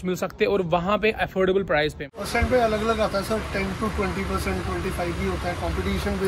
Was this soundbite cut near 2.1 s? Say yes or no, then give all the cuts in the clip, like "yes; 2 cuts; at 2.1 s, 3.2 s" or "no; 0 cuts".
yes; 1 cut; at 2.1 s